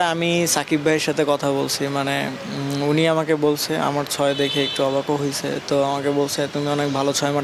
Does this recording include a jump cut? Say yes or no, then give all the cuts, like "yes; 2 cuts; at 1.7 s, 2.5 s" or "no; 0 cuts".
no; 0 cuts